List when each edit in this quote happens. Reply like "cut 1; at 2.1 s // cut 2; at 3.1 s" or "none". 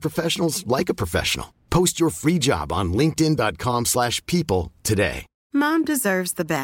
cut 1; at 5.3 s